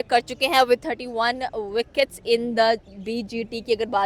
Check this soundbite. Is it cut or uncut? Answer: uncut